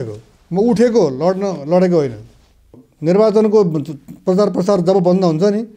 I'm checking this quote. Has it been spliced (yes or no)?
yes